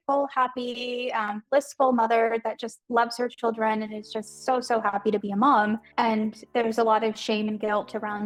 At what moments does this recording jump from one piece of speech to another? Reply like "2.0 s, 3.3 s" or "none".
none